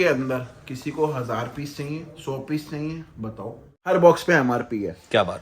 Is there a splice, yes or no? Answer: yes